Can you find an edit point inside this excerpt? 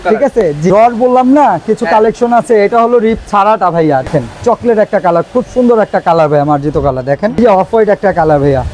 yes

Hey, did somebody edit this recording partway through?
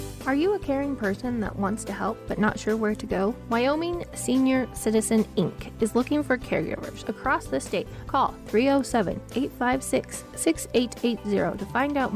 yes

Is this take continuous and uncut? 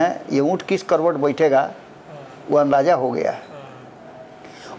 yes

